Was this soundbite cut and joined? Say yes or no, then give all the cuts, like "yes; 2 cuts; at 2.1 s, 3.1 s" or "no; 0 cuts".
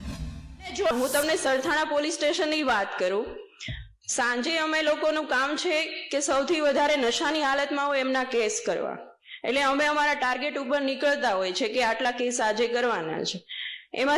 yes; 1 cut; at 0.9 s